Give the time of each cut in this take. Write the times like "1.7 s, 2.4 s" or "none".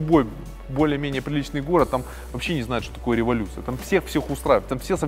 none